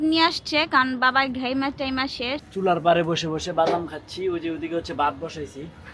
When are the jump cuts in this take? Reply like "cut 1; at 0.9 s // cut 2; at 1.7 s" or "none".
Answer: cut 1; at 2.5 s